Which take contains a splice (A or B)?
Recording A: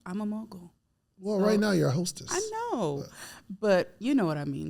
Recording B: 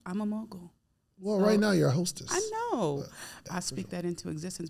B